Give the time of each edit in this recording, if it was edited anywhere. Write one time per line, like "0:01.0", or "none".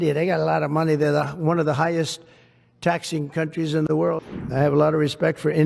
0:04.2